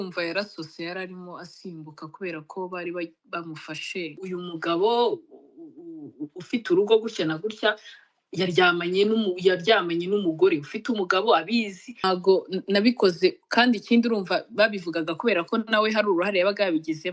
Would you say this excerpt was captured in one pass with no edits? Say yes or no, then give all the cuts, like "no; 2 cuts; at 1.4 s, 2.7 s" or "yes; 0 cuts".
no; 2 cuts; at 4.2 s, 12.0 s